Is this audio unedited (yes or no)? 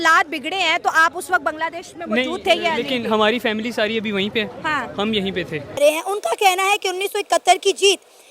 no